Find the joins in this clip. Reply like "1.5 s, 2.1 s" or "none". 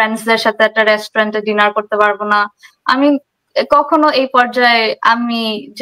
none